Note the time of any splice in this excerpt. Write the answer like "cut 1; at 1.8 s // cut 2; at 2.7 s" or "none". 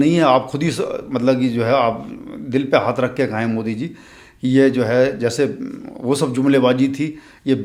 none